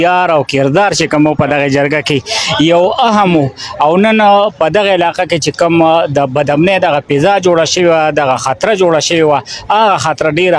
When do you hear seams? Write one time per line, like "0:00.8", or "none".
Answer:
none